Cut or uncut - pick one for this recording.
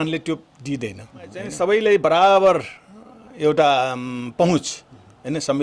cut